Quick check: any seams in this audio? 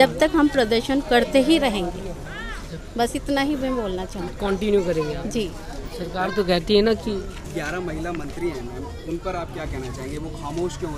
no; 0 cuts

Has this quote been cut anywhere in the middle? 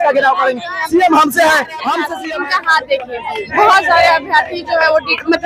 yes; 1 cut; at 2.1 s

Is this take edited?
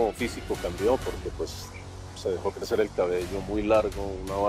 no; 0 cuts

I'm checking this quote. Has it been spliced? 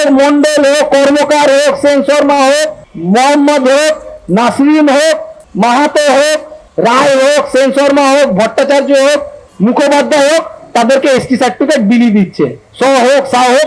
no; 0 cuts

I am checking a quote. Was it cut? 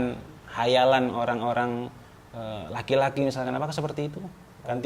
no; 0 cuts

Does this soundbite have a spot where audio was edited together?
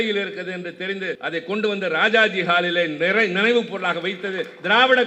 yes; 1 cut; at 1.2 s

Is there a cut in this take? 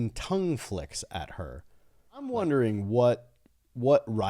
yes; 1 cut; at 2.3 s

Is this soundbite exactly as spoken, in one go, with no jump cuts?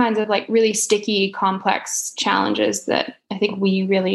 yes; 0 cuts

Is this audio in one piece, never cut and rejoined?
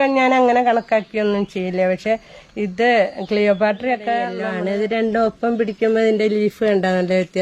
no; 1 cut; at 4.4 s

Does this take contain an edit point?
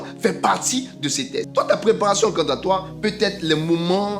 yes; 1 cut; at 1.5 s

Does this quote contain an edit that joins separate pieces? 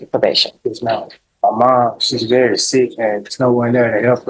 yes; 1 cut; at 1.2 s

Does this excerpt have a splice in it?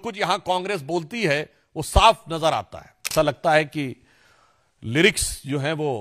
yes; 1 cut; at 3.1 s

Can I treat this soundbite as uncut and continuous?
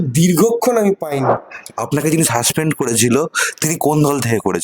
no; 1 cut; at 1.4 s

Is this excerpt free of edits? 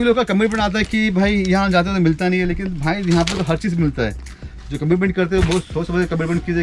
yes; 0 cuts

